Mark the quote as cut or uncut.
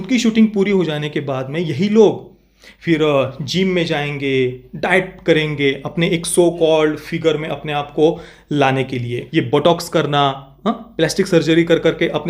cut